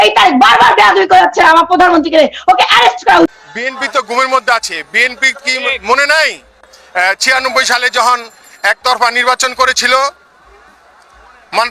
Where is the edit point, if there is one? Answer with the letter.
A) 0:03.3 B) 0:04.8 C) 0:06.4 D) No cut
A